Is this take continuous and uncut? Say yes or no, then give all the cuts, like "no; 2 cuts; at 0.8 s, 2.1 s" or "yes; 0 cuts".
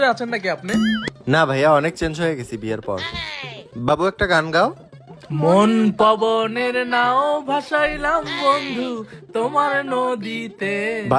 yes; 0 cuts